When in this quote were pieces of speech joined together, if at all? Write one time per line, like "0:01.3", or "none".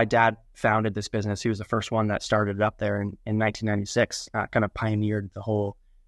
none